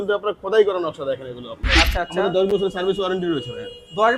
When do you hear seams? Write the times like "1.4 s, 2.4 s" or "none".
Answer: 1.7 s